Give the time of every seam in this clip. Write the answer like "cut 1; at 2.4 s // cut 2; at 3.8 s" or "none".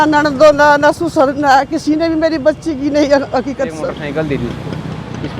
cut 1; at 4.0 s